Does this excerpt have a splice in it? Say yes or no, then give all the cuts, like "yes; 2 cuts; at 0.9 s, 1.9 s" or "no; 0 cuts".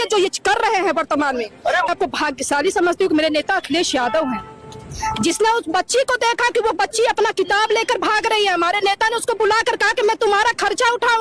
yes; 1 cut; at 1.9 s